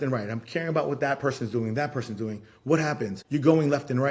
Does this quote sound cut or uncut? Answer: cut